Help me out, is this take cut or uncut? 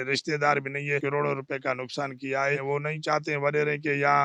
cut